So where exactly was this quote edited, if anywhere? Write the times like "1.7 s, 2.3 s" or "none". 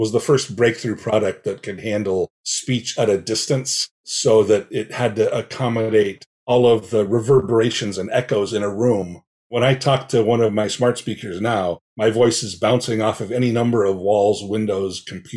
none